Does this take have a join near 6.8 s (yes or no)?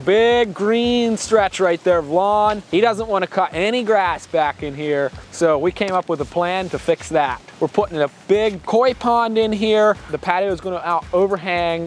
no